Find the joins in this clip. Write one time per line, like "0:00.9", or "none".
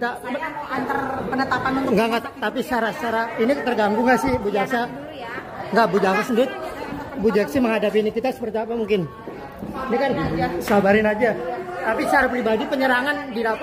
none

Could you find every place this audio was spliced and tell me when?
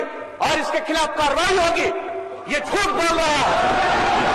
none

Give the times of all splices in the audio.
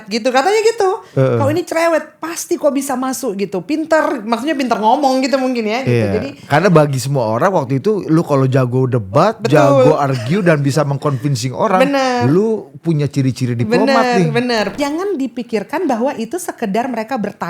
0:14.8

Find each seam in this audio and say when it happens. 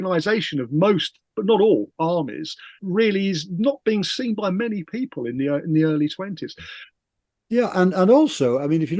0:02.8
0:06.9

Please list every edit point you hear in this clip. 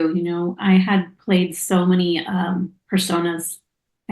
none

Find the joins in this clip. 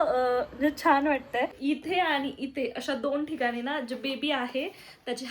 0:01.6

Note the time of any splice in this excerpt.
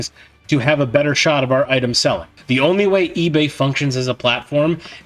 0:02.3

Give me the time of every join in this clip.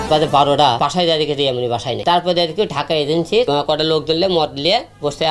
0:00.8
0:02.0
0:03.5

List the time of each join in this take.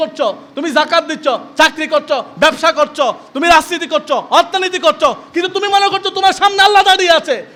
none

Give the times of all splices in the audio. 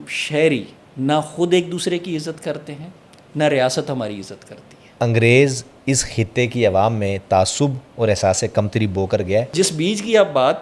0:04.8
0:09.5

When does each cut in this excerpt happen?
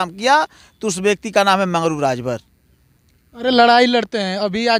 none

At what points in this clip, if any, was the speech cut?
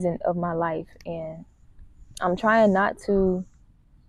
none

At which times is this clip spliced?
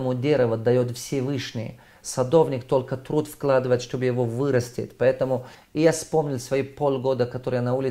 0:05.6

